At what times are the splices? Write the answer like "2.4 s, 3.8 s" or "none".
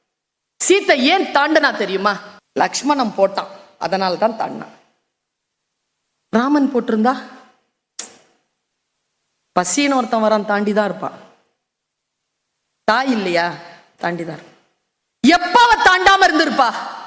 none